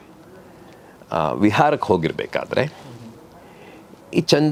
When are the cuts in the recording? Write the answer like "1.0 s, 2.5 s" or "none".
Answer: none